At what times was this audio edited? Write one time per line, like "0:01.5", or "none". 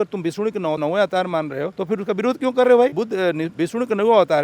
0:00.8
0:01.8
0:02.9